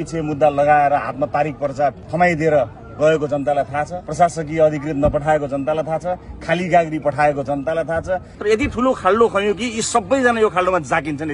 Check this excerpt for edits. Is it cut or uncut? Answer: cut